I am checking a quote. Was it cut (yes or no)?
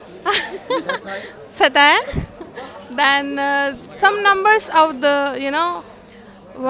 no